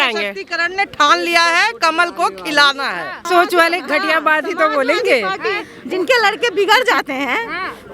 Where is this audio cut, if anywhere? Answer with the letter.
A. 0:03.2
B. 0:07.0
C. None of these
A